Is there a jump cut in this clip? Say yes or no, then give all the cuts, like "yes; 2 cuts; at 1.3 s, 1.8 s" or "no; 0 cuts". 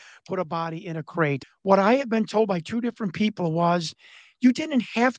yes; 1 cut; at 1.4 s